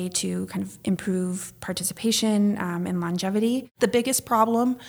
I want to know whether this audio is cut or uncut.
cut